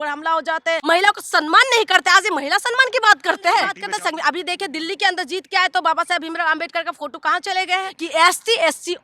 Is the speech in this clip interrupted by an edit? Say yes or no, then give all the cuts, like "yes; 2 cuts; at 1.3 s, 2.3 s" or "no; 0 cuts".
yes; 3 cuts; at 0.8 s, 3.7 s, 8.0 s